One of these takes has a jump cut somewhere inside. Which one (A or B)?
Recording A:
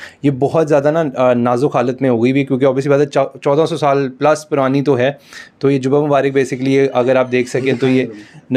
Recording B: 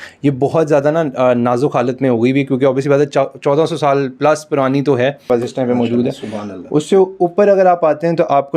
B